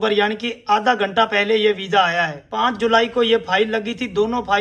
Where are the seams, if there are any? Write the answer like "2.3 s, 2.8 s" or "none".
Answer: 2.4 s